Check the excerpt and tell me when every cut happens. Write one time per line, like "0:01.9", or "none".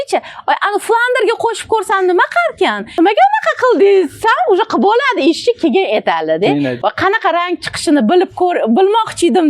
0:03.0
0:06.8